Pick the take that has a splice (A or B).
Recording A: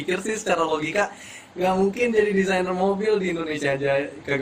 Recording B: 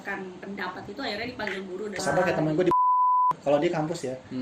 B